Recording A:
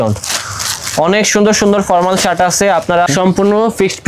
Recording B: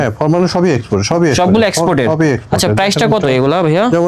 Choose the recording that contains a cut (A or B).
A